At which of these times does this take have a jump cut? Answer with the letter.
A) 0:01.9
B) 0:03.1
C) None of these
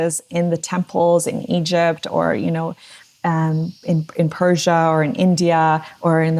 C